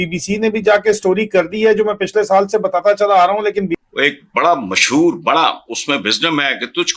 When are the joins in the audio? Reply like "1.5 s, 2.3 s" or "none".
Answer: 3.8 s